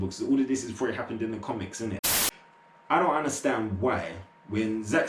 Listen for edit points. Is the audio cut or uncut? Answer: cut